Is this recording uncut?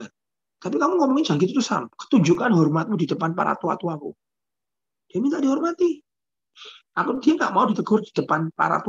no; 1 cut; at 1.9 s

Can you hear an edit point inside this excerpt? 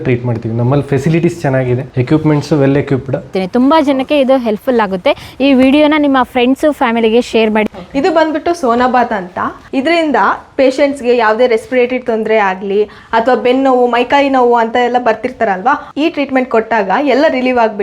yes; 4 cuts; at 1.9 s, 3.4 s, 7.6 s, 9.6 s

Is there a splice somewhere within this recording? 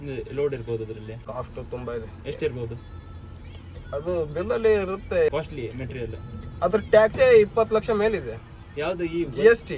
yes; 2 cuts; at 1.1 s, 5.3 s

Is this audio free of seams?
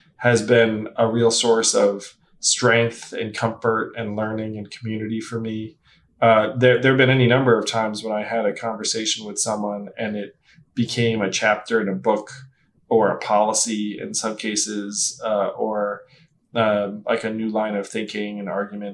yes; 0 cuts

